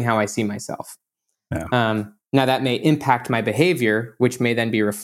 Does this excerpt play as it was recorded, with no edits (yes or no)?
yes